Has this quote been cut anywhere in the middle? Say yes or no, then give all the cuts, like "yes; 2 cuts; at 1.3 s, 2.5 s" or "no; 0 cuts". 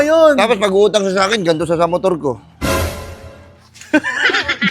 no; 0 cuts